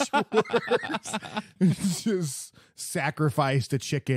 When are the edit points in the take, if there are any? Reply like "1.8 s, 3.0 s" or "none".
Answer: 1.5 s